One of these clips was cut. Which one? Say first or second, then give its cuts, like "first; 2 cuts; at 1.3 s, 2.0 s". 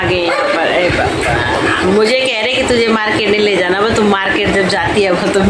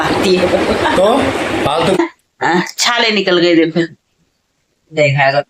second; 1 cut; at 2.0 s